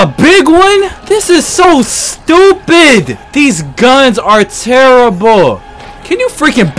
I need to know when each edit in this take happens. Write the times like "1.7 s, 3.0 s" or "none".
1.0 s, 3.2 s